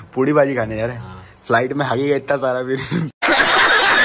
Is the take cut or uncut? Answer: cut